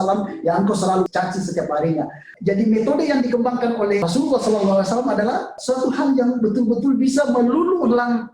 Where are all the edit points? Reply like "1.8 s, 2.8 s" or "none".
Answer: 1.1 s, 2.2 s, 4.1 s, 5.6 s